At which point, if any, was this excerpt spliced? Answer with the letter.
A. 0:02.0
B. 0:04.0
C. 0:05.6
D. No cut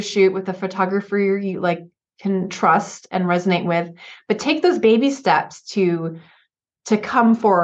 D